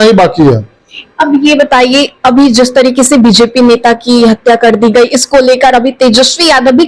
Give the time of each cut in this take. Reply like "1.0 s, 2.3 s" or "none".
none